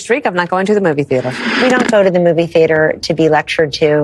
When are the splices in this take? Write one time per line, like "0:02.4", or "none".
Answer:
0:01.5